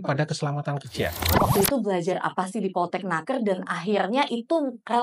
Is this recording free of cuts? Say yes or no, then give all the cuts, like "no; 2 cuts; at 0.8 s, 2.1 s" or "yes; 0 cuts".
no; 1 cut; at 1.3 s